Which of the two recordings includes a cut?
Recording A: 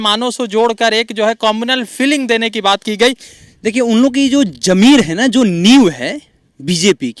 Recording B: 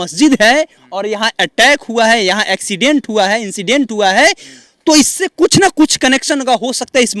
A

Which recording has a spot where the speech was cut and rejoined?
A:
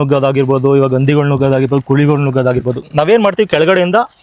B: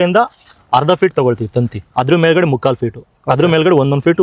B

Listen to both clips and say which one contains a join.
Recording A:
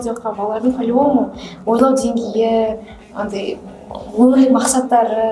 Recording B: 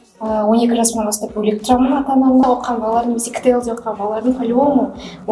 B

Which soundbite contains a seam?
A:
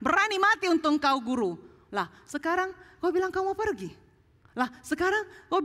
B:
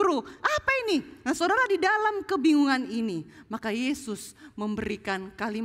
B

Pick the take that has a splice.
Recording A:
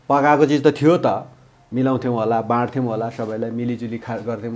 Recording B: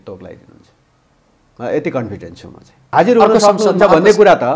B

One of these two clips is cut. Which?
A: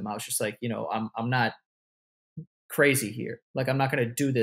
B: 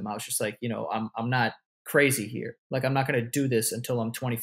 B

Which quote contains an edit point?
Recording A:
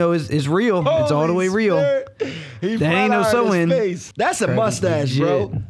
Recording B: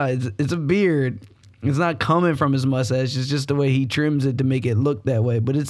A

